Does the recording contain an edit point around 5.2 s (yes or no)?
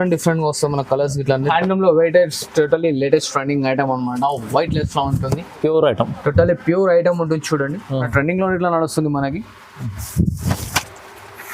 no